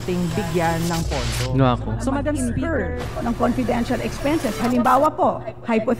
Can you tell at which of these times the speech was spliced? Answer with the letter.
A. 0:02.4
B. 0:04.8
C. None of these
A